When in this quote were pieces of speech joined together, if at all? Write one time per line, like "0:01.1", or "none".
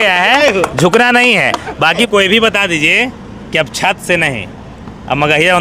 0:02.0